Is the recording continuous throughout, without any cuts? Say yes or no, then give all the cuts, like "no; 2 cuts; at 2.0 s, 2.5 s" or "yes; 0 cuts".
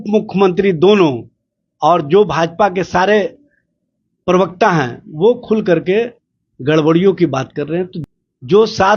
no; 1 cut; at 8.0 s